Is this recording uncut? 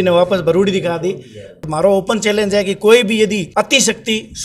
no; 2 cuts; at 1.7 s, 3.5 s

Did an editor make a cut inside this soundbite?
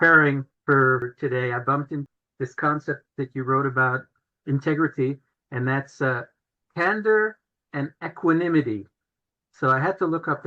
yes; 4 cuts; at 0.8 s, 2.1 s, 3.1 s, 4.3 s

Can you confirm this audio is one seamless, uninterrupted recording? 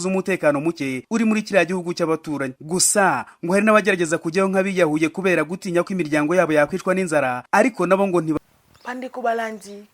no; 1 cut; at 8.4 s

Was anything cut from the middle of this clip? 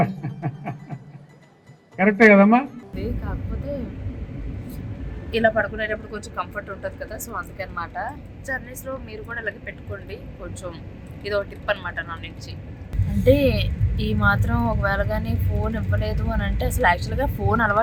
no; 0 cuts

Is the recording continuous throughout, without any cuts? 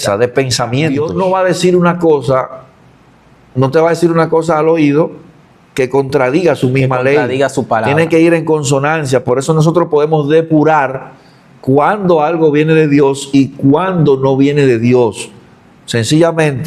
no; 1 cut; at 1.0 s

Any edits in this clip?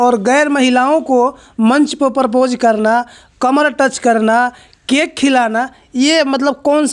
no; 0 cuts

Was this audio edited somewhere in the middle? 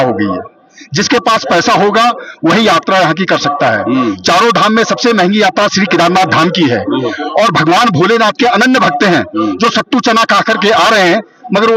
no; 0 cuts

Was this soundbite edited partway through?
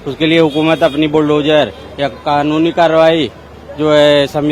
no; 0 cuts

